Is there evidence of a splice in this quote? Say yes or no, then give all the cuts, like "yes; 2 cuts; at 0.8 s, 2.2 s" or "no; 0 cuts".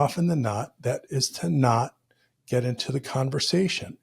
yes; 1 cut; at 1.0 s